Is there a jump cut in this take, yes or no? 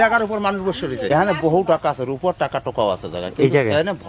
yes